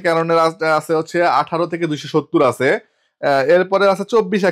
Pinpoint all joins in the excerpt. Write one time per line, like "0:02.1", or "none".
none